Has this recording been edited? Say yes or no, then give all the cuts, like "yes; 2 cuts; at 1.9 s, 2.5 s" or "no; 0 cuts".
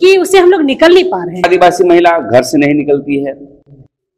yes; 1 cut; at 1.5 s